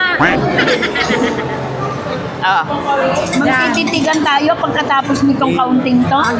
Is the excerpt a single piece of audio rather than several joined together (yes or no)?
yes